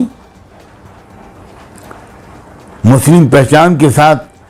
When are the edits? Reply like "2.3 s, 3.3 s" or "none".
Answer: none

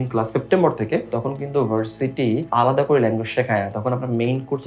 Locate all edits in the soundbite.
2.5 s

